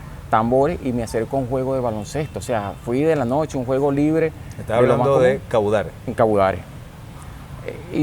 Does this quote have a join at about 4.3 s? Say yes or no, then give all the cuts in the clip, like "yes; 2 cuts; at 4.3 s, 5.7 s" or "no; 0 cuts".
no; 0 cuts